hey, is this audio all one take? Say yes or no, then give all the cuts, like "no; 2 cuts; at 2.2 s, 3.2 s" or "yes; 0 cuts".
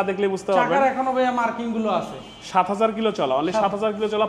yes; 0 cuts